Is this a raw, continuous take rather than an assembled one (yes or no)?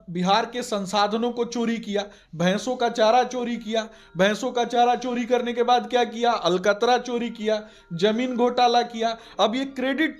yes